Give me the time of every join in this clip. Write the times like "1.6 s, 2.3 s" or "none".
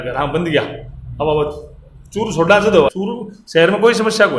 2.9 s